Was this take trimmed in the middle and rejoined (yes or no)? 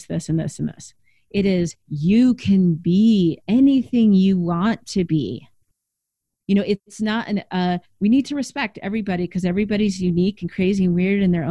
no